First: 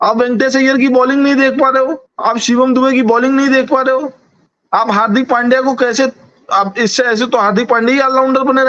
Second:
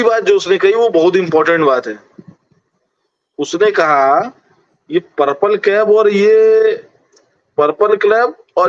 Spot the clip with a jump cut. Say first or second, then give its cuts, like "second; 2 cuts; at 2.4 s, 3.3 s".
first; 1 cut; at 2.1 s